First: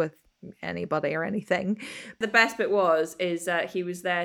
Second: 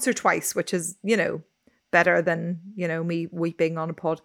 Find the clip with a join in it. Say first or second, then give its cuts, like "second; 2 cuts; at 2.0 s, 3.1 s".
first; 1 cut; at 2.1 s